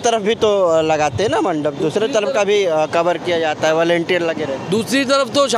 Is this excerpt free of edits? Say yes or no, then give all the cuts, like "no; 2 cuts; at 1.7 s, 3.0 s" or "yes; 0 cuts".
yes; 0 cuts